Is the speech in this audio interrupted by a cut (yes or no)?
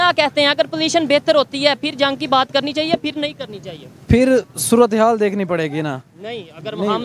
no